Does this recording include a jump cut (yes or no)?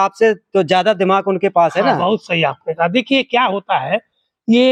no